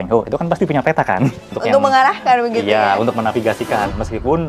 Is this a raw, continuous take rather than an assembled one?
no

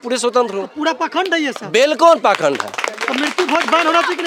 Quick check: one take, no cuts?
yes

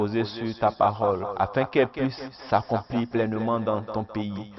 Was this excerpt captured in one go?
yes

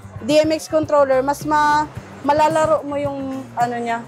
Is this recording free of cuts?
yes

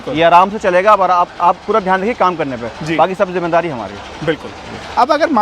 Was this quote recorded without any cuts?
yes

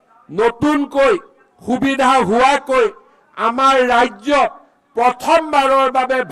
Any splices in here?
no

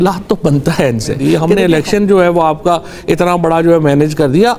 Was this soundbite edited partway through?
yes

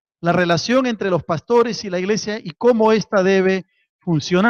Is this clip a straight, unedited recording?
no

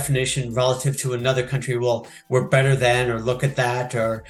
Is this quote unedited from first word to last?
yes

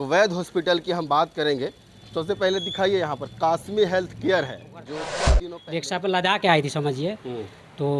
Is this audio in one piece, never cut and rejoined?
no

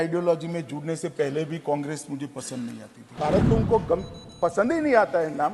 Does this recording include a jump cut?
yes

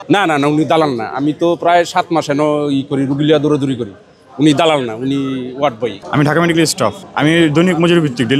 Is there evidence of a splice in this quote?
yes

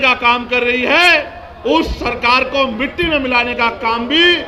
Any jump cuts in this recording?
no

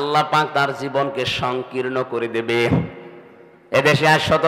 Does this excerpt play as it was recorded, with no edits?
yes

